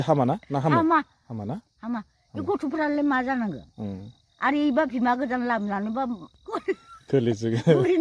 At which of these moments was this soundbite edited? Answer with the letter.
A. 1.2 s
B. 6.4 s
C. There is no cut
B